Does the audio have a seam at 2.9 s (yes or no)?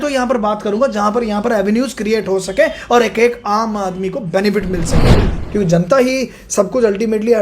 no